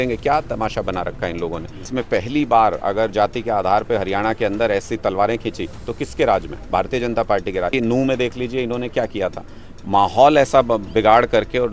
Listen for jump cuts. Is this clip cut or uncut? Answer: cut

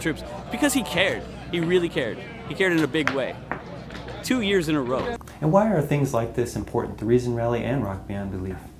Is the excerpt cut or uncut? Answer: uncut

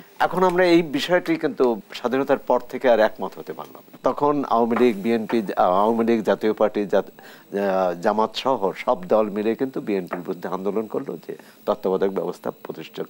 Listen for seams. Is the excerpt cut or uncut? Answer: cut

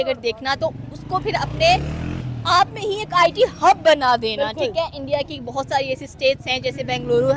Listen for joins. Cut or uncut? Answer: uncut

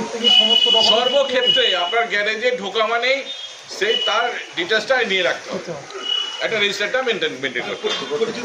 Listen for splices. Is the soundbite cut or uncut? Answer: uncut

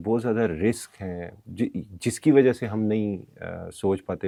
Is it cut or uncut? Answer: uncut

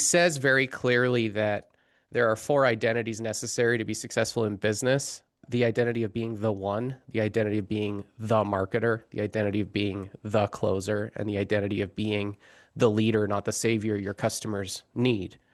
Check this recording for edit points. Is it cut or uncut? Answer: uncut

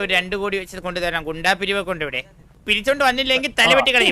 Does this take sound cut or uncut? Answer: cut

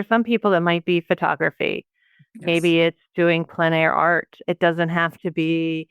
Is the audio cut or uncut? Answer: cut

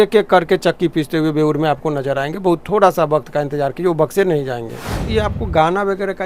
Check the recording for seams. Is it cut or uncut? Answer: cut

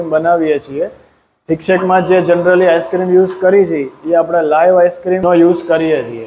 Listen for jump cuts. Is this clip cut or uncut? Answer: cut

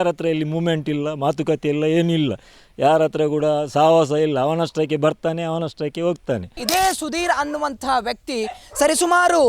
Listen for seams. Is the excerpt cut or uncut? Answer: cut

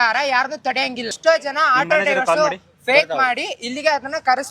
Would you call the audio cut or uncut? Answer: cut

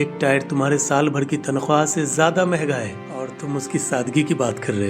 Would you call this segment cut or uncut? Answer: cut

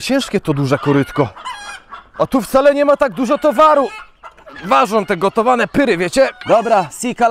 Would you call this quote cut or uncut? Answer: uncut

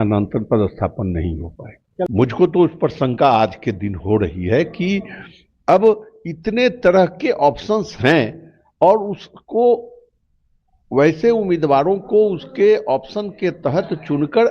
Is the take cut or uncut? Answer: cut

